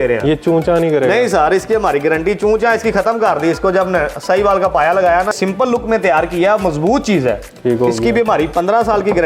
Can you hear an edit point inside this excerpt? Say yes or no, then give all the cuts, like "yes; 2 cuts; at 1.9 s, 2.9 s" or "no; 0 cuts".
yes; 1 cut; at 5.3 s